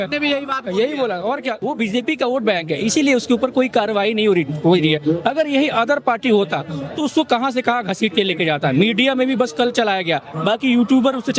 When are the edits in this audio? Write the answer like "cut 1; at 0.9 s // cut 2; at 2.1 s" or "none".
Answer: cut 1; at 1.6 s